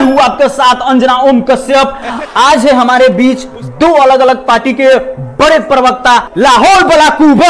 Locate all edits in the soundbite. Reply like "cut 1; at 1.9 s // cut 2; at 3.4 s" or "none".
cut 1; at 6.3 s